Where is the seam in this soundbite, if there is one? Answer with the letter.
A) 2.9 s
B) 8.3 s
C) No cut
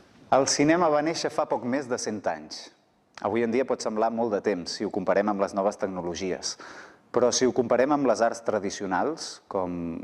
B